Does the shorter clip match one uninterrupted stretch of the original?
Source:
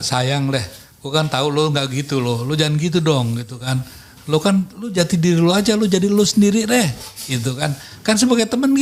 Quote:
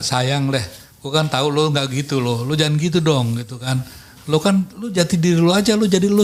yes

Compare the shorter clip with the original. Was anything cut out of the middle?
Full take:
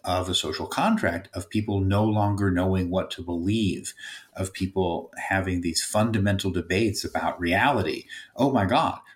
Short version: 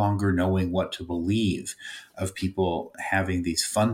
no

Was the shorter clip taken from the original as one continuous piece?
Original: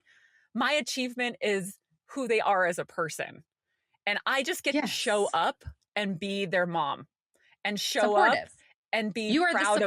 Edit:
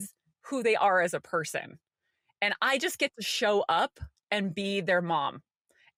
yes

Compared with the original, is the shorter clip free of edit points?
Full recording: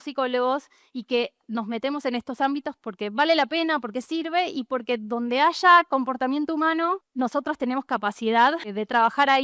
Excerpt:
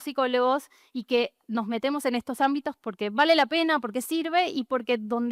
yes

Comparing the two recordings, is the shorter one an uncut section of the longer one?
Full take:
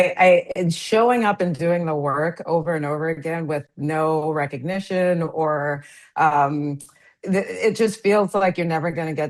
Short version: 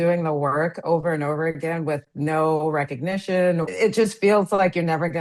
no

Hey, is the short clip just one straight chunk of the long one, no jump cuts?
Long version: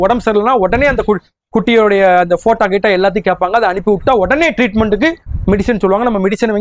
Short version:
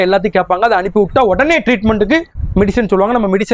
yes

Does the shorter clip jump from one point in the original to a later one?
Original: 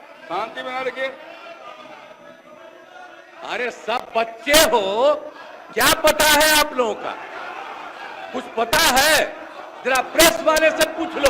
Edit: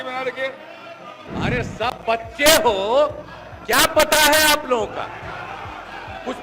yes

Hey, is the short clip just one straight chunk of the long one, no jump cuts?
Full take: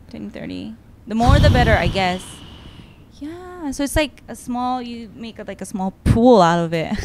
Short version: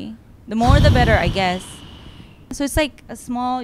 no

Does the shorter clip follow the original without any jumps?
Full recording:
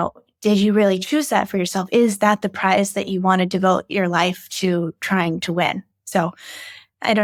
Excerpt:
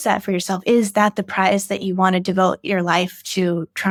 yes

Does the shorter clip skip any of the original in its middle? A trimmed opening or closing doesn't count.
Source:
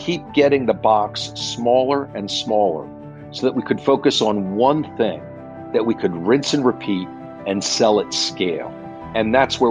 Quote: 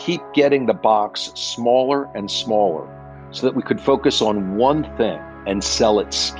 yes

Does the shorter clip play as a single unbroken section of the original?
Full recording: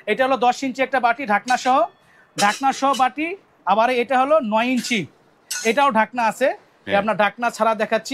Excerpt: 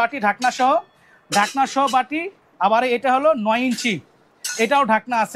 yes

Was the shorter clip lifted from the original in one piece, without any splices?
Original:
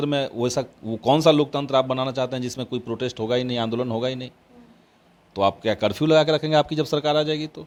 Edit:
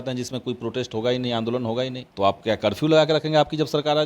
no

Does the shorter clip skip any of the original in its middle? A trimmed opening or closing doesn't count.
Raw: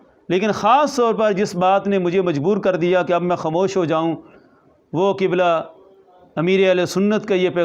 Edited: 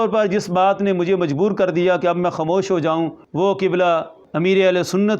yes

